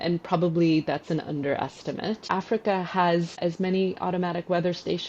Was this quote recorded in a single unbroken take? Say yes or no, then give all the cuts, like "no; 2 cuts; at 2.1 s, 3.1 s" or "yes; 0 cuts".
no; 2 cuts; at 2.2 s, 3.4 s